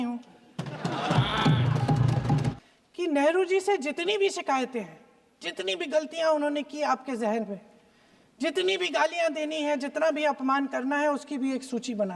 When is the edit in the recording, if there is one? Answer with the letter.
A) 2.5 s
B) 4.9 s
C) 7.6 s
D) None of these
A